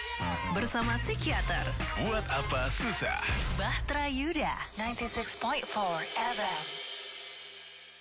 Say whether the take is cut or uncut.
uncut